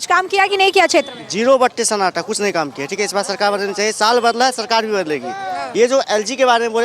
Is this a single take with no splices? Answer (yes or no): yes